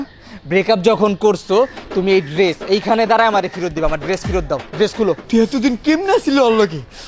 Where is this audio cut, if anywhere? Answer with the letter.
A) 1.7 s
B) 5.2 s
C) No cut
B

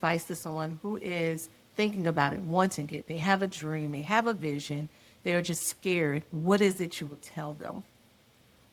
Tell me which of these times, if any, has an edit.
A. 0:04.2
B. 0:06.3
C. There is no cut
C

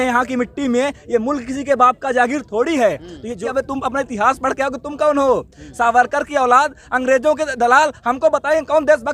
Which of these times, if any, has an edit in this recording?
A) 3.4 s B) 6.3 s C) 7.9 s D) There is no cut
A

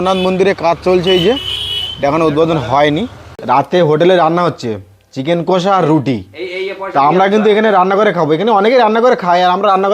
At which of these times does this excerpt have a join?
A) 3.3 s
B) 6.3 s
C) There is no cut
A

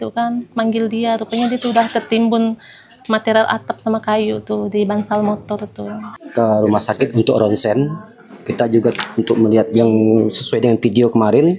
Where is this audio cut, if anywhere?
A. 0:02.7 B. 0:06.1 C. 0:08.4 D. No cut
B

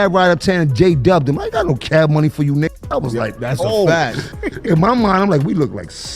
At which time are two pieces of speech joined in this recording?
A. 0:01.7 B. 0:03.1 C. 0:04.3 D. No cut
C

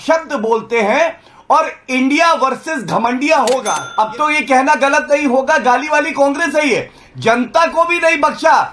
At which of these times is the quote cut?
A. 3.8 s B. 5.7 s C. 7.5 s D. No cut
A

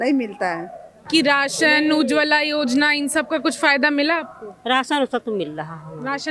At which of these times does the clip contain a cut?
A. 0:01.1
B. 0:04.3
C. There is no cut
A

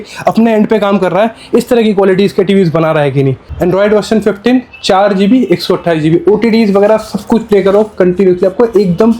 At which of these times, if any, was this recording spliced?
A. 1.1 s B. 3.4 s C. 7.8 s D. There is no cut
B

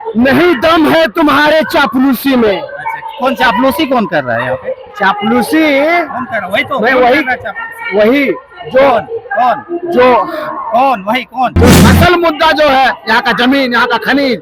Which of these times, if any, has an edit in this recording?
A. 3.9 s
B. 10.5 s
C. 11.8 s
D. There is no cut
C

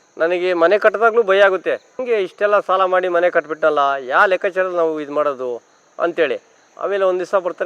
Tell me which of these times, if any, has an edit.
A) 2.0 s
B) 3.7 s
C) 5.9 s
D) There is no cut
A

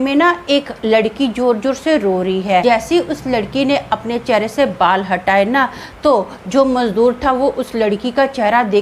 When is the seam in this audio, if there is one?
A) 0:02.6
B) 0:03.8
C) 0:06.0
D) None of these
A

